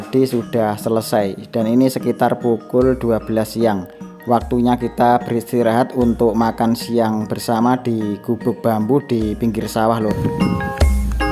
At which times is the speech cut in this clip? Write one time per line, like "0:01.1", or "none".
0:10.1